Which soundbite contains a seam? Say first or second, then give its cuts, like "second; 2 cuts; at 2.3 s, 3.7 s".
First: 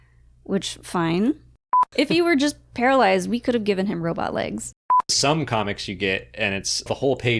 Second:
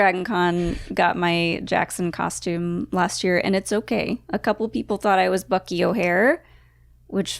first; 2 cuts; at 1.9 s, 5.0 s